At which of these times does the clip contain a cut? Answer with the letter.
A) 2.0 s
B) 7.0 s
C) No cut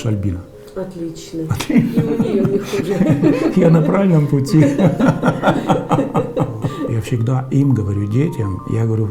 B